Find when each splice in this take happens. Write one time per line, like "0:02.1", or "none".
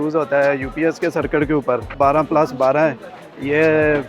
0:01.9